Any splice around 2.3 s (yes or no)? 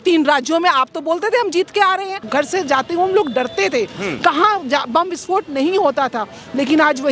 yes